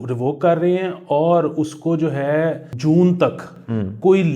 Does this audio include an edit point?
yes; 1 cut; at 2.7 s

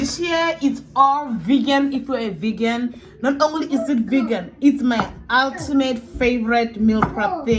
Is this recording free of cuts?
yes; 0 cuts

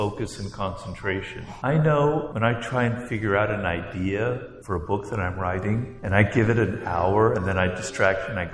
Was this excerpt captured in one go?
no; 4 cuts; at 1.4 s, 2.3 s, 4.5 s, 5.9 s

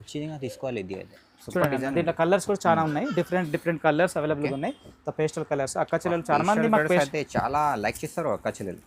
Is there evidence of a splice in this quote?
no; 0 cuts

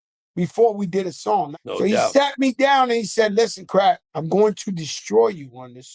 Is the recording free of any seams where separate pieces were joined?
no; 2 cuts; at 1.5 s, 4.1 s

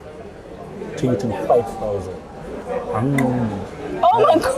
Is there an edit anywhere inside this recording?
yes; 1 cut; at 2.6 s

